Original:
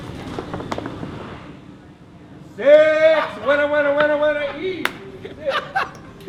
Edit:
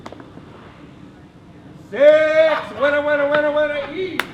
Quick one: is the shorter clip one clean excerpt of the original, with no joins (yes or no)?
yes